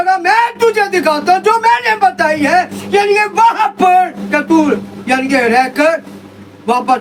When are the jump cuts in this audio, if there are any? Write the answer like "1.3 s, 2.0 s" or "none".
none